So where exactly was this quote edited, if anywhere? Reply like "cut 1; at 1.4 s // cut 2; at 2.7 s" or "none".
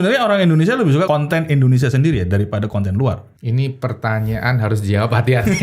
cut 1; at 1.1 s // cut 2; at 3.3 s